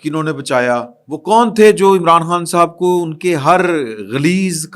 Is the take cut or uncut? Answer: cut